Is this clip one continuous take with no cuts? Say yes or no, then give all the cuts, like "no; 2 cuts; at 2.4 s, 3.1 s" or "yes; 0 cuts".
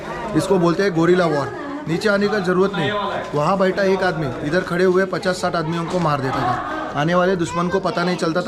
yes; 0 cuts